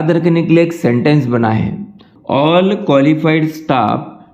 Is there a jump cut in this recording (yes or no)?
yes